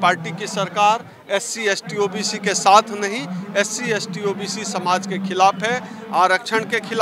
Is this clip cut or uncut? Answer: uncut